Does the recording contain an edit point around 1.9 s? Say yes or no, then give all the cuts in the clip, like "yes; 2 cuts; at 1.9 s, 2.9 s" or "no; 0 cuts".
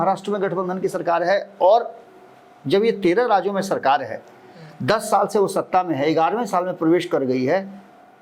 no; 0 cuts